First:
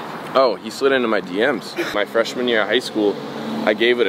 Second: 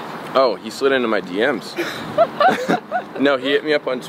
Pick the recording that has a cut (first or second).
first